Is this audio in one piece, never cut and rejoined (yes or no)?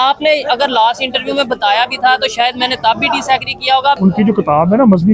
no